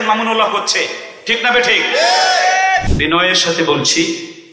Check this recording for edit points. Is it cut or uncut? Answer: cut